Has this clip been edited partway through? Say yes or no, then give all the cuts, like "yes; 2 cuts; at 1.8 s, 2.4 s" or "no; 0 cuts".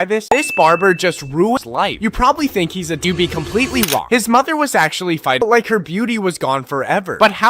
yes; 3 cuts; at 1.6 s, 3.0 s, 5.4 s